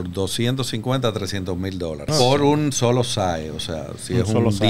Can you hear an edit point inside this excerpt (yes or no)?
yes